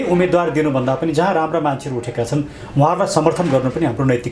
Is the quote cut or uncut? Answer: uncut